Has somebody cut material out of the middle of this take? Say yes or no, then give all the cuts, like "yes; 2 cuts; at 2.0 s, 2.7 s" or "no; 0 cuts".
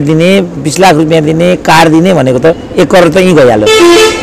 no; 0 cuts